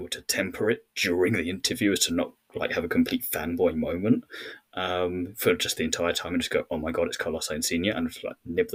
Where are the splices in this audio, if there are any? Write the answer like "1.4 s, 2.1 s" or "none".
none